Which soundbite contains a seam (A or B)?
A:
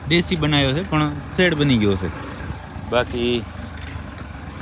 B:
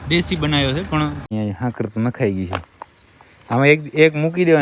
B